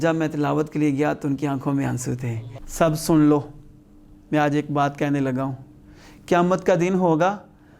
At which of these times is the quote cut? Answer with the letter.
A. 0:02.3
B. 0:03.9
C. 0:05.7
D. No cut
A